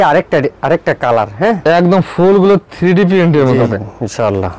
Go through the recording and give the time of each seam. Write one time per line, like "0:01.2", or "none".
0:03.7